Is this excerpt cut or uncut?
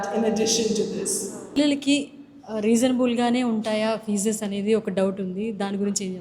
cut